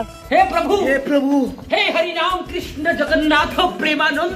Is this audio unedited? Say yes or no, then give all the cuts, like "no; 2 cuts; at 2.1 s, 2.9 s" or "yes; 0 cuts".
yes; 0 cuts